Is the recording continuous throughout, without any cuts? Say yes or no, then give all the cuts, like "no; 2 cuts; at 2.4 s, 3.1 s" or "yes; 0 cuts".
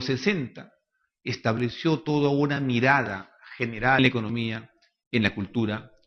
yes; 0 cuts